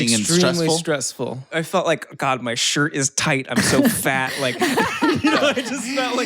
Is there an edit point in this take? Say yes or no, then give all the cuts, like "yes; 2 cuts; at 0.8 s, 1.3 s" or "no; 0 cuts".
yes; 1 cut; at 1.5 s